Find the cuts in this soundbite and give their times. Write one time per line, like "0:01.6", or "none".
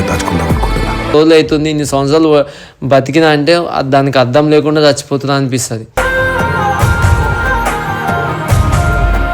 0:01.1